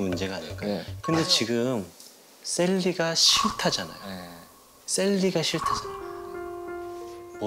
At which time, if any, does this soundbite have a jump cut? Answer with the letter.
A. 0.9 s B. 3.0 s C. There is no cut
A